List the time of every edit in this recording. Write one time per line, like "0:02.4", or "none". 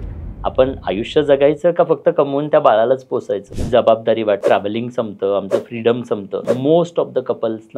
0:03.5
0:04.4
0:06.4